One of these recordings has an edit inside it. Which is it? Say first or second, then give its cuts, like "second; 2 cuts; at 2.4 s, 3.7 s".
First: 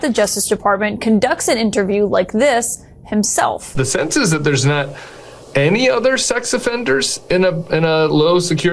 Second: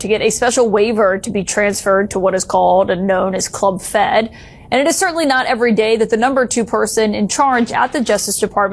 first; 1 cut; at 3.7 s